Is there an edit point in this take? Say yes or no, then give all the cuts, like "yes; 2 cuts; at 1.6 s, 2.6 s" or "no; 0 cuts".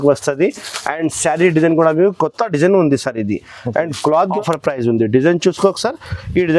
yes; 1 cut; at 4.3 s